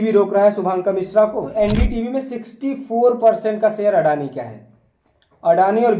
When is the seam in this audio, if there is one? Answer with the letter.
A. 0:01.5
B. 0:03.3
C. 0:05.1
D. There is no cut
A